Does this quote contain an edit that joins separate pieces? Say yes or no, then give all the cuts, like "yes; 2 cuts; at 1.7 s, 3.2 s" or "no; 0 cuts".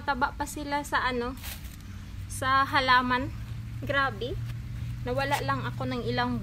no; 0 cuts